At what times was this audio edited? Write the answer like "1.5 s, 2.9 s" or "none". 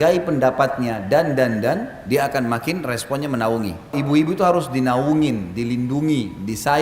3.9 s